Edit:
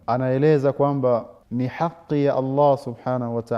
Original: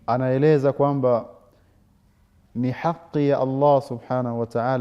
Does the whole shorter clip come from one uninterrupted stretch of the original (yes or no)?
no